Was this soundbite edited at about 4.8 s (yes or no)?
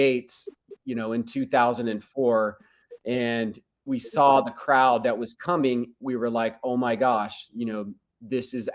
no